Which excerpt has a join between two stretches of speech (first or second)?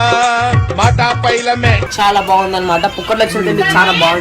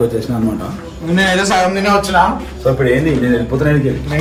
first